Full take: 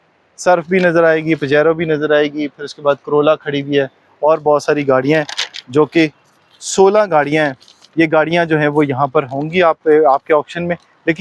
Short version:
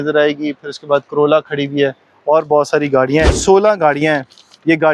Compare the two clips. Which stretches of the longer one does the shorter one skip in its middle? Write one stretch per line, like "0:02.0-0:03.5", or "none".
0:05.3-0:06.7